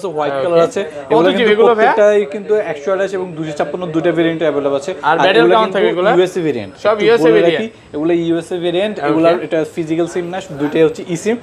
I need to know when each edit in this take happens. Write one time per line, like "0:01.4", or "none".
none